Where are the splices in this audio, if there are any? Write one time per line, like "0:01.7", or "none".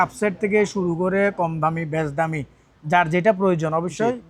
none